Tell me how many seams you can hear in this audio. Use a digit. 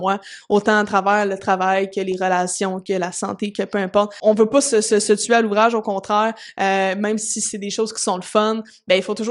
1